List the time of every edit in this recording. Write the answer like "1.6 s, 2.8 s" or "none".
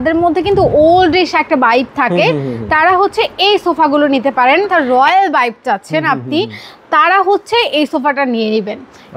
4.7 s